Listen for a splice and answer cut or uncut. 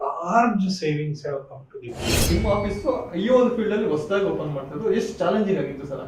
cut